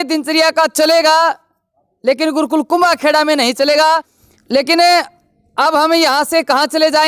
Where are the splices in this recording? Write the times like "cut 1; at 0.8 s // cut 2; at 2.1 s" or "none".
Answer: cut 1; at 4.1 s

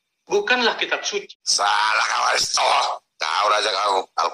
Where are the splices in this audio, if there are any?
cut 1; at 1.4 s

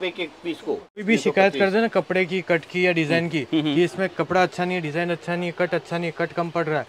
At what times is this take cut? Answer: cut 1; at 1.1 s

